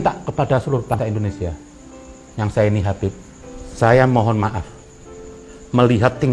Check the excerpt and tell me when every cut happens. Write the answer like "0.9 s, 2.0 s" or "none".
0.9 s